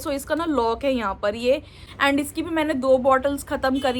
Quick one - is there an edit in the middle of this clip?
yes; 1 cut; at 1.8 s

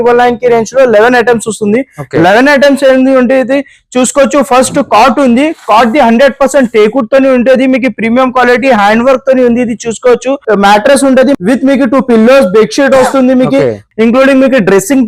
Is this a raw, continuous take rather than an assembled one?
no; 3 cuts; at 10.4 s, 11.4 s, 13.8 s

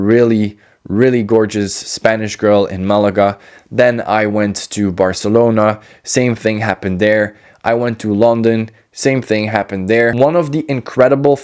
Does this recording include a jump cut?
no; 0 cuts

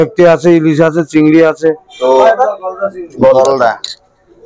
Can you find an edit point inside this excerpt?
yes; 1 cut; at 2.2 s

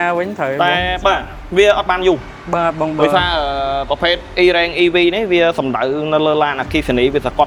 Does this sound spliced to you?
no; 0 cuts

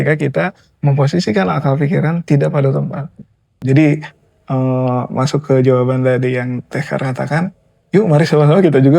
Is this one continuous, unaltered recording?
no; 1 cut; at 3.5 s

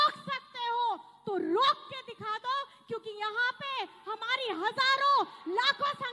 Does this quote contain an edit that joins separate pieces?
no; 0 cuts

